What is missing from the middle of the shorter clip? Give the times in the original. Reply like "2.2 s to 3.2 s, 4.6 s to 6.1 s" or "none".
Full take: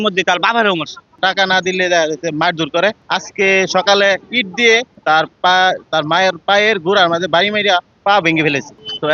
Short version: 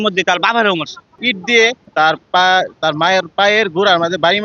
1.1 s to 4.2 s